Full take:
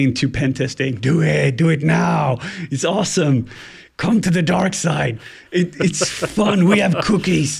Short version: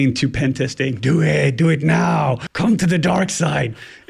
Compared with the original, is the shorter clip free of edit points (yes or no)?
no